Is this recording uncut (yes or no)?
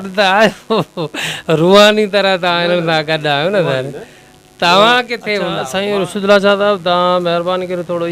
no